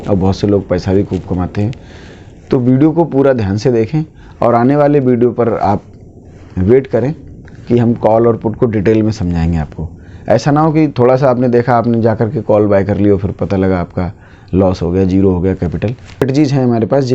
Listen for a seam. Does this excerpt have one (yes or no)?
yes